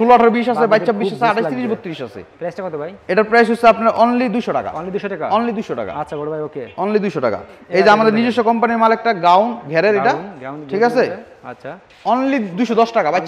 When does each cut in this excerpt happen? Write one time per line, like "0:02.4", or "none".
none